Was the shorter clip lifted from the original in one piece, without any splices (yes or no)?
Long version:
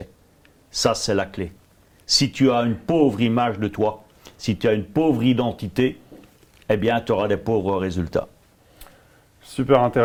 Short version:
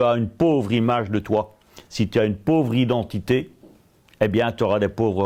yes